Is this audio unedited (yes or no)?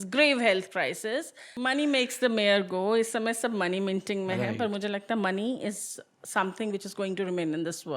no